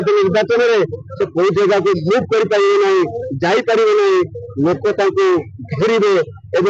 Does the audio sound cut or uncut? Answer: uncut